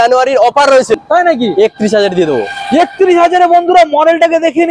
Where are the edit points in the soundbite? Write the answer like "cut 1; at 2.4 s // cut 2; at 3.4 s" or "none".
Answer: cut 1; at 1.0 s